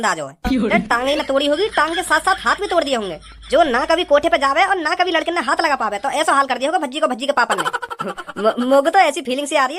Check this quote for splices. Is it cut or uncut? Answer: uncut